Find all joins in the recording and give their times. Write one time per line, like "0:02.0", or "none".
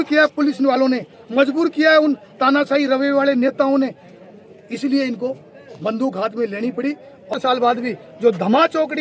0:07.3